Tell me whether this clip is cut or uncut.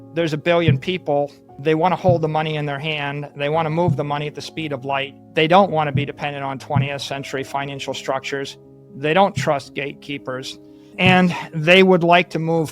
cut